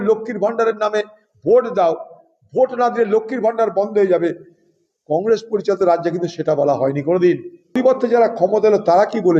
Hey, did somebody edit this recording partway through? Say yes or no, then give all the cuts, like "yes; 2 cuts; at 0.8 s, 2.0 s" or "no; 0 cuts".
yes; 1 cut; at 7.8 s